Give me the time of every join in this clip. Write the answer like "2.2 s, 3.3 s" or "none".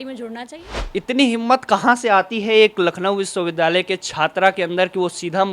1.0 s